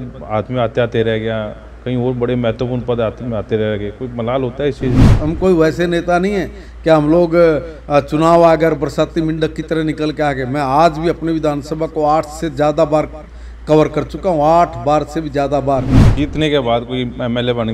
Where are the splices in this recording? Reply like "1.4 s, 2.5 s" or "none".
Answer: 5.1 s, 16.0 s